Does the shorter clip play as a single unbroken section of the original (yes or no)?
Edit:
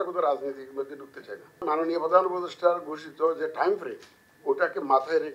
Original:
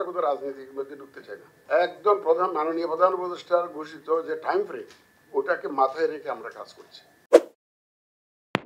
no